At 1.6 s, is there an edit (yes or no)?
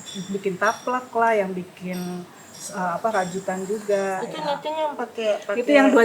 no